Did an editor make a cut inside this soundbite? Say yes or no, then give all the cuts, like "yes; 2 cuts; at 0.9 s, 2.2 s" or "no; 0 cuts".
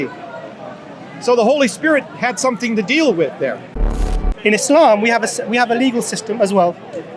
yes; 1 cut; at 3.8 s